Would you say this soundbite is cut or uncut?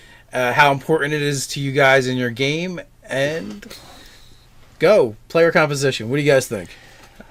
uncut